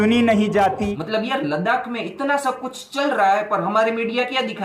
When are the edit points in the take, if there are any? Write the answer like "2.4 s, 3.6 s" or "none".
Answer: 1.0 s